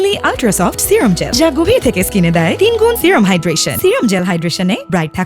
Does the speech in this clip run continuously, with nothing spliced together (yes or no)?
yes